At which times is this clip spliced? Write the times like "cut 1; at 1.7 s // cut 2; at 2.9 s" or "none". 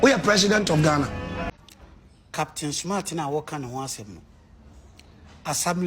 cut 1; at 1.5 s